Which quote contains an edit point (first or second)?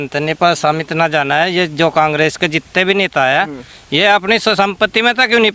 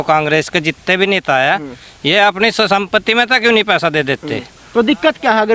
second